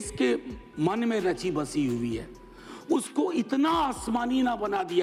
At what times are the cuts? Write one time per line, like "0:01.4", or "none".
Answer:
none

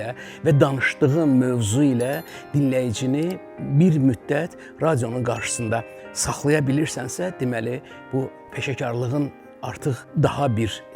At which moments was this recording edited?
0:08.5
0:10.0

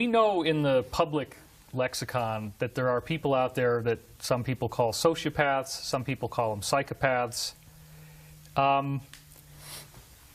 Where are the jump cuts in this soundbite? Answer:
0:04.3

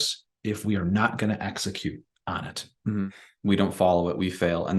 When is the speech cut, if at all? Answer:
0:03.0

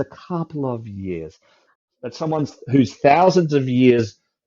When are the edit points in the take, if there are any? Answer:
0:01.7

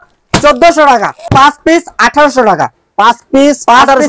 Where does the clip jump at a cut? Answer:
0:01.3

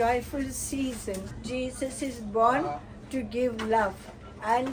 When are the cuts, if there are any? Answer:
0:01.3

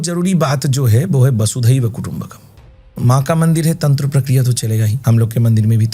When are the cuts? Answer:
0:02.9
0:05.0

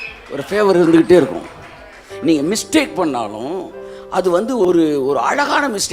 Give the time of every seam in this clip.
0:04.7

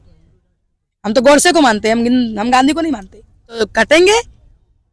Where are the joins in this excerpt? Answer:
0:03.6

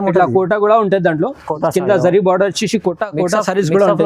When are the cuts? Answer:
none

